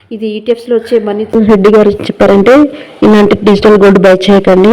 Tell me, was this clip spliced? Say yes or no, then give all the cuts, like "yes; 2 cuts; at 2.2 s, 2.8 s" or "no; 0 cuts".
yes; 1 cut; at 1.3 s